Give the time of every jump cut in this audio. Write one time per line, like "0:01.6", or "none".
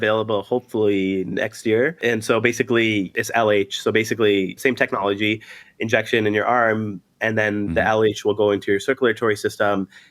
0:02.0
0:03.1
0:04.6